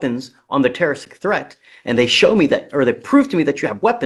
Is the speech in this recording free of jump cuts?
yes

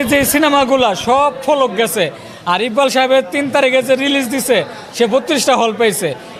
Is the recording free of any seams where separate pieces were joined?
yes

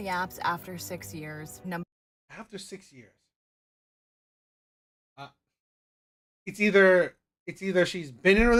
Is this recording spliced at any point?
no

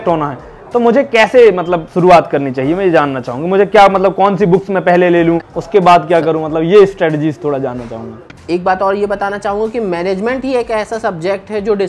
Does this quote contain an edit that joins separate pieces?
yes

